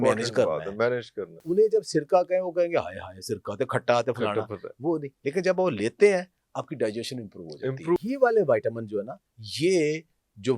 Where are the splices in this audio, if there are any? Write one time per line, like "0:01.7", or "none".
0:01.3
0:08.0